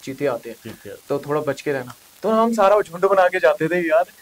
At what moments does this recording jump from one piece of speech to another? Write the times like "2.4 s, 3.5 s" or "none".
none